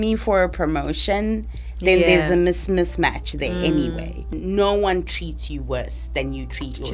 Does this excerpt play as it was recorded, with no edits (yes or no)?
no